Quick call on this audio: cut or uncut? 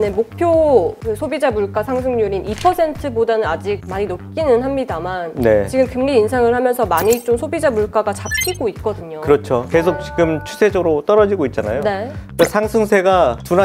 cut